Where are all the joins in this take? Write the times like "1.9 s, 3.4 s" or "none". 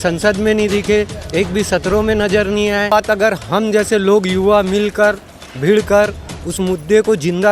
2.9 s